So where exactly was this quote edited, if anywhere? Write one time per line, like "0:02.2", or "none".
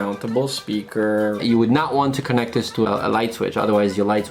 0:01.4

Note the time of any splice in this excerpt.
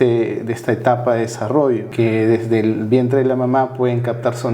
0:01.9

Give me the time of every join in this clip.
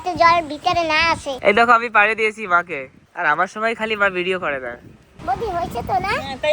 0:01.3

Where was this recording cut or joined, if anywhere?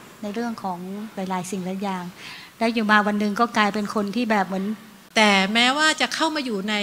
0:04.9

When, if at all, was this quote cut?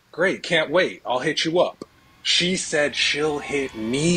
none

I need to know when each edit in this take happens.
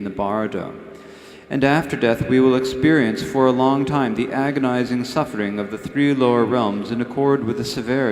0:03.0

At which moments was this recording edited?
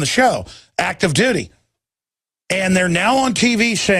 none

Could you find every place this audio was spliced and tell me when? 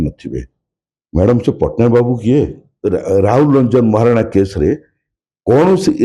0:02.7

